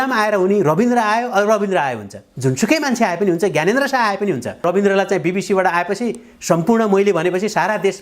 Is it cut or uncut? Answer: cut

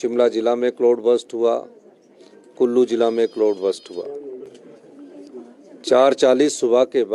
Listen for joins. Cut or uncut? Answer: cut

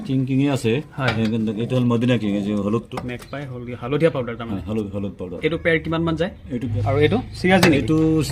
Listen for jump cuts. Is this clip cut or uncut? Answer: cut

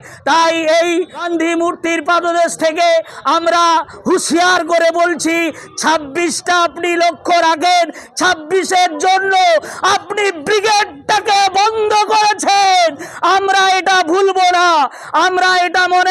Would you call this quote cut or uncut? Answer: cut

